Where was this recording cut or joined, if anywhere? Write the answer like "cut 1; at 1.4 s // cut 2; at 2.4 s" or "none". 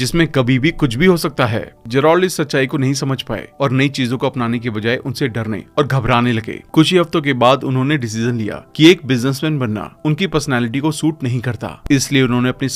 none